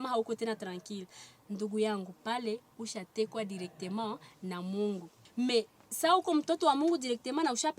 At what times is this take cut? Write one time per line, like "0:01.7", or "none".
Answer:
0:05.2